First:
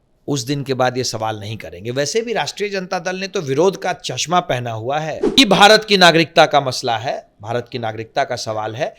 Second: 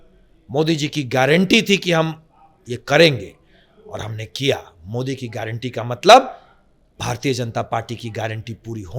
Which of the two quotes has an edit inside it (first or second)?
first